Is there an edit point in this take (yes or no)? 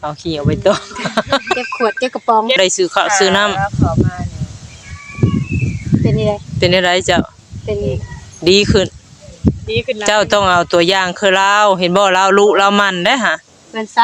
yes